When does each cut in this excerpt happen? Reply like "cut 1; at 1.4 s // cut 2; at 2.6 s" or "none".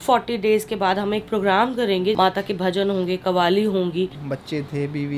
cut 1; at 2.1 s // cut 2; at 4.1 s